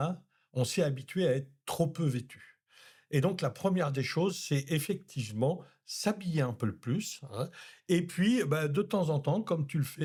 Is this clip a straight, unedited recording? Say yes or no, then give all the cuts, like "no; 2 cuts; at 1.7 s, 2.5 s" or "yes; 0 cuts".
yes; 0 cuts